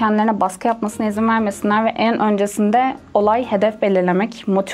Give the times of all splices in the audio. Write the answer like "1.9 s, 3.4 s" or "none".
none